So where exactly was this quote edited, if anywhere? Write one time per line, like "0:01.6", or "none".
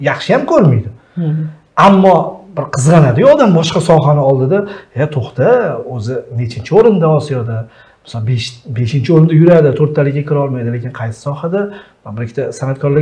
none